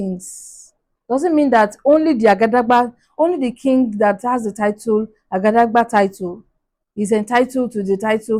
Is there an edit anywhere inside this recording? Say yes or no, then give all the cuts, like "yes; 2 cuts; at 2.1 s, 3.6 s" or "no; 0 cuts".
no; 0 cuts